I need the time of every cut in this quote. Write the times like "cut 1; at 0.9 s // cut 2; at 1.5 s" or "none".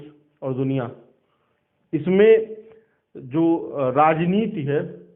none